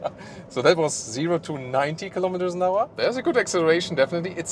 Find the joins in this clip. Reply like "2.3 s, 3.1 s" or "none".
2.9 s

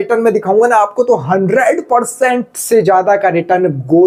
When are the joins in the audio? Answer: none

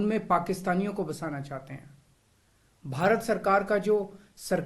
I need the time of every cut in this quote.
none

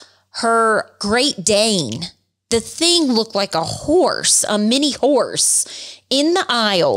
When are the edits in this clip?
1.0 s, 2.4 s

